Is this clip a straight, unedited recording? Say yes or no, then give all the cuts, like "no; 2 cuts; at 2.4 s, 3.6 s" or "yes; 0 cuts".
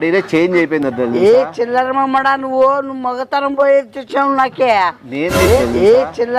no; 2 cuts; at 1.0 s, 5.6 s